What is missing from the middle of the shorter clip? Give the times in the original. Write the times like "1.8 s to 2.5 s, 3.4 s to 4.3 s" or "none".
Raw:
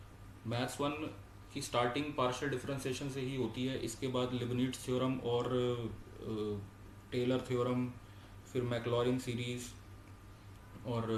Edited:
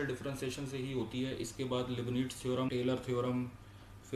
5.1 s to 7.1 s

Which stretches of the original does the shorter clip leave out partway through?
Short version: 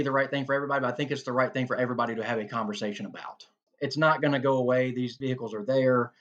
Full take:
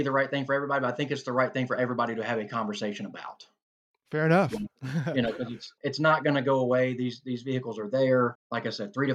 3.6 s to 5.6 s, 7.2 s to 7.4 s

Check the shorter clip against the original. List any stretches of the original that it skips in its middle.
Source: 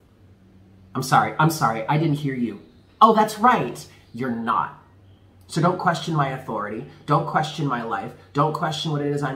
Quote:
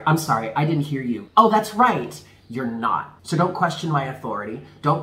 2.6 s to 2.9 s, 4.8 s to 5.4 s

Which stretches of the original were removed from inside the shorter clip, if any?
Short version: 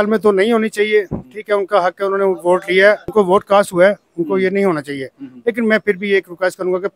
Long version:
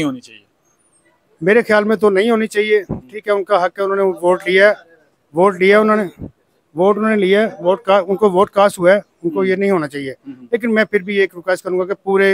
4.8 s to 8.1 s

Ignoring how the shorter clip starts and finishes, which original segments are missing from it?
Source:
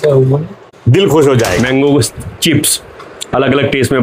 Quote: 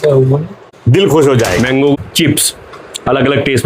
1.9 s to 2.2 s

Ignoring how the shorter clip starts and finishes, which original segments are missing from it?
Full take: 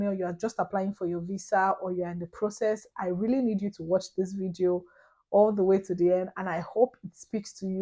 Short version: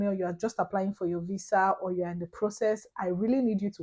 none

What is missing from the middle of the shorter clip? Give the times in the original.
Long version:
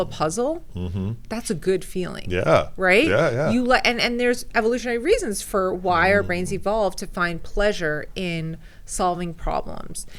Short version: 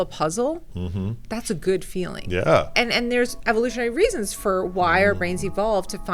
2.7 s to 3.8 s

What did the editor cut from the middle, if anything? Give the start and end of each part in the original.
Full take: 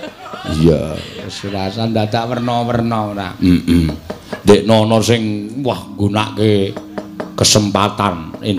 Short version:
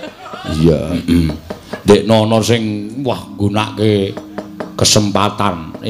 1.0 s to 3.6 s

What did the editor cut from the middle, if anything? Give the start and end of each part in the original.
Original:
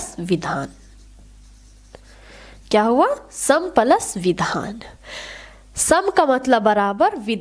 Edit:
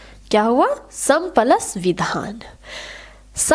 none

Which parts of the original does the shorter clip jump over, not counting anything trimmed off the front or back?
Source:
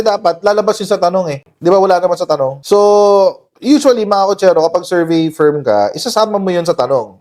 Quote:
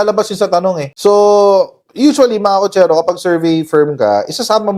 1.4 s to 2.6 s

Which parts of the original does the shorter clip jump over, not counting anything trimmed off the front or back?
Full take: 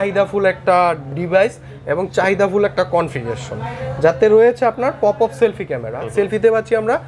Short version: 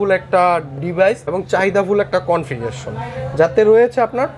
1.6 s to 1.9 s

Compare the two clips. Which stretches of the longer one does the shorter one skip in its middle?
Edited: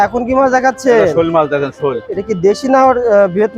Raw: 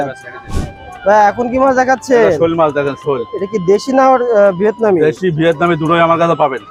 none

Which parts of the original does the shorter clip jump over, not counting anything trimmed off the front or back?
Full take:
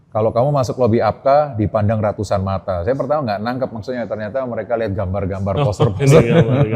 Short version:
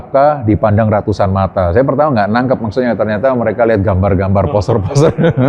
none

